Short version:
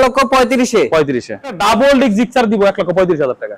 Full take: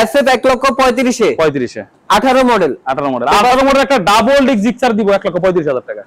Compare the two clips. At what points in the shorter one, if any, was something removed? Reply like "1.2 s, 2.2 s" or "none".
1.6 s